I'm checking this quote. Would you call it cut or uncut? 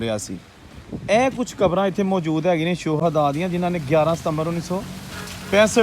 cut